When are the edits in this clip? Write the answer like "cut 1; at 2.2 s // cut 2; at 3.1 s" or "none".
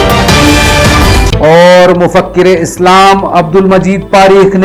cut 1; at 1.1 s

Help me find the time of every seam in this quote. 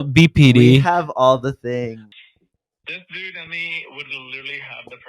cut 1; at 2.0 s

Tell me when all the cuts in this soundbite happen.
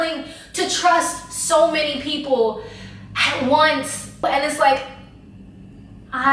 cut 1; at 4.2 s

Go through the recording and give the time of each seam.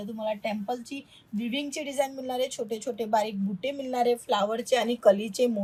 none

